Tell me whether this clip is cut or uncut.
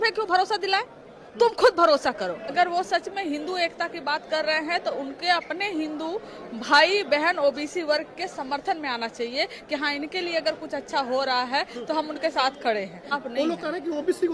cut